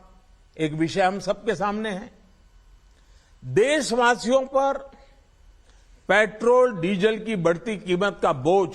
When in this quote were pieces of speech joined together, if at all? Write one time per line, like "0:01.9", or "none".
0:03.9